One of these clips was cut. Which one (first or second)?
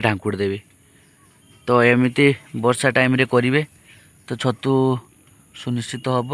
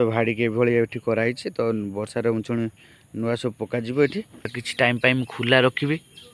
second